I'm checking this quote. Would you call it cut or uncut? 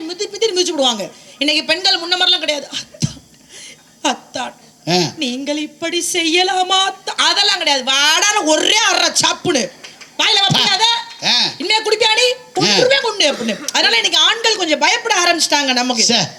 uncut